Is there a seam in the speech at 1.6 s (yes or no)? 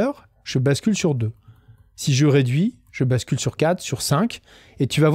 no